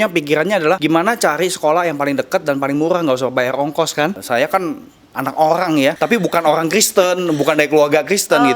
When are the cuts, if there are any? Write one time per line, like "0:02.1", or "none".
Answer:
0:00.8
0:04.2
0:06.0